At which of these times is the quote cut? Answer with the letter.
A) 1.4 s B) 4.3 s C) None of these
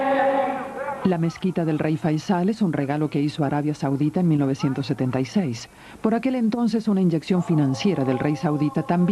A